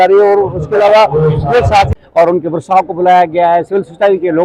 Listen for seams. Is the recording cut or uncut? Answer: cut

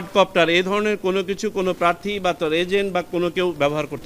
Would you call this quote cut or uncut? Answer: uncut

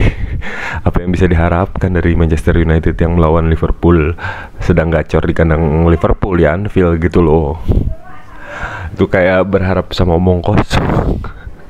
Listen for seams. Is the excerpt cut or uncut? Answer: uncut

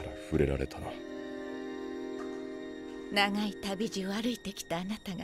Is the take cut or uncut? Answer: uncut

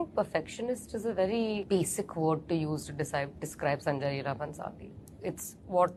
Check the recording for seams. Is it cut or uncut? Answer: uncut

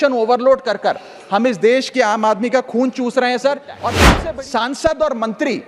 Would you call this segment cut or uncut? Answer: cut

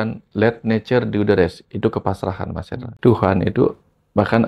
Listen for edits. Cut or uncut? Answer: cut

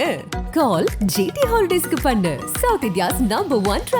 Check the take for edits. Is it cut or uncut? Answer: uncut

